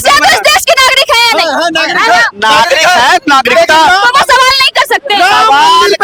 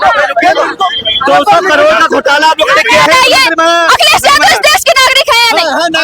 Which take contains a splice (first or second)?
second